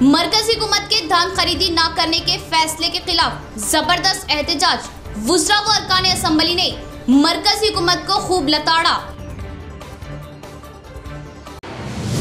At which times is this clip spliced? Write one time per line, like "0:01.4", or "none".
none